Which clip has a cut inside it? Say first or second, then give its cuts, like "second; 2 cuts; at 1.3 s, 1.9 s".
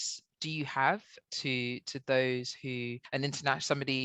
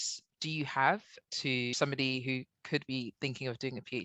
second; 1 cut; at 1.7 s